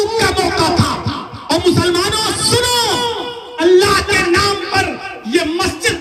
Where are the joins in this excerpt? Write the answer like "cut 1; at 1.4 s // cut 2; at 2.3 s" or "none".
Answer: none